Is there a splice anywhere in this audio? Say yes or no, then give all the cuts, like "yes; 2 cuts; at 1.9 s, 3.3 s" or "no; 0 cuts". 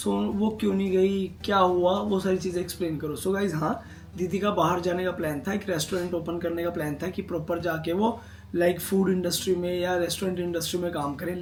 no; 0 cuts